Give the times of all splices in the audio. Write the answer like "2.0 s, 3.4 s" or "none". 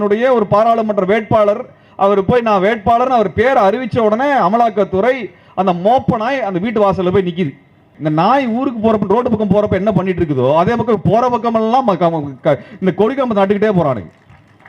7.9 s